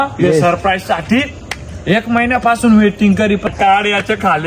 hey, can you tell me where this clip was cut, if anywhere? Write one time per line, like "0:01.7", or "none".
0:03.5